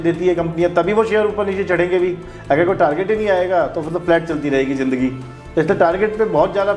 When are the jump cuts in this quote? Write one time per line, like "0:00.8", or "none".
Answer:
none